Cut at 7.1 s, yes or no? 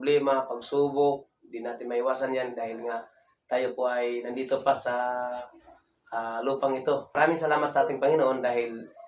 yes